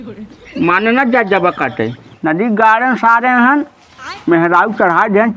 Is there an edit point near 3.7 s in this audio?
no; 1 cut; at 1.9 s

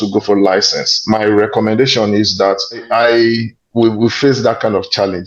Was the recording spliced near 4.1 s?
no; 1 cut; at 2.8 s

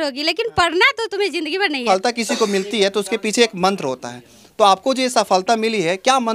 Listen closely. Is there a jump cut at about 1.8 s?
yes; 1 cut; at 1.8 s

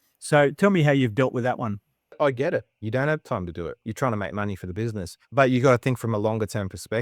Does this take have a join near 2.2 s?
yes; 3 cuts; at 2.2 s, 3.8 s, 5.1 s

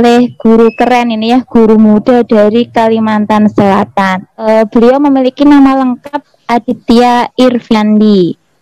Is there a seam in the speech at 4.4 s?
yes; 1 cut; at 4.4 s

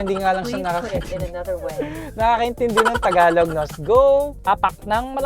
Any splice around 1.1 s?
no; 2 cuts; at 3.6 s, 4.4 s

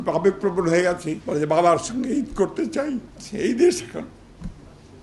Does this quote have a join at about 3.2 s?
yes; 2 cuts; at 1.1 s, 3.2 s

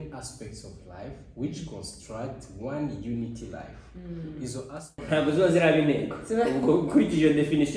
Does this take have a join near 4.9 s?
yes; 1 cut; at 4.9 s

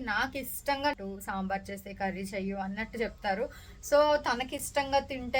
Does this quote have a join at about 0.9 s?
yes; 1 cut; at 0.9 s

